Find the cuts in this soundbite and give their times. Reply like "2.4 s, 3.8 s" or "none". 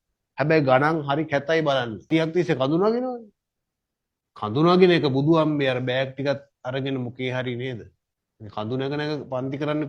2.1 s

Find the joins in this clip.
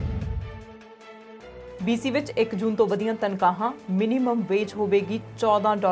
1.7 s

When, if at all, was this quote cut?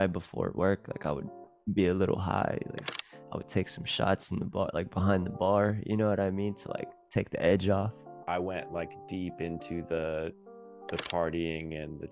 8.1 s

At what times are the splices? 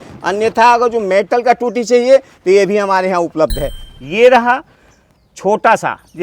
3.8 s

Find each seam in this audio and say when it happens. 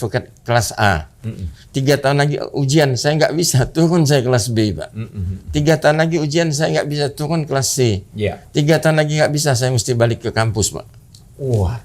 none

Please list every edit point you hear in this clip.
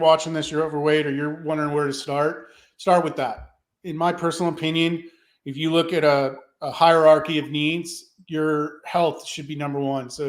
none

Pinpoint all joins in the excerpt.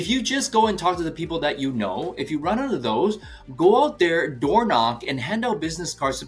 none

